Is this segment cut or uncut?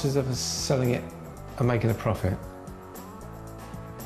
uncut